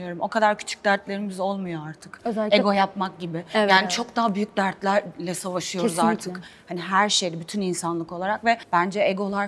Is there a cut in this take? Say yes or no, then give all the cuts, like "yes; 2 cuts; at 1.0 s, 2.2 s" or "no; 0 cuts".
no; 0 cuts